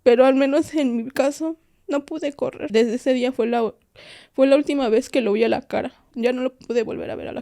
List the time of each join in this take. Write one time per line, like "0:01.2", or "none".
0:02.6
0:06.1

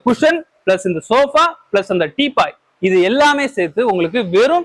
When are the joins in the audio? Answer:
none

